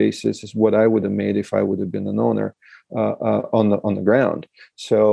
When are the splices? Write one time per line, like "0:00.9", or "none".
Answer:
none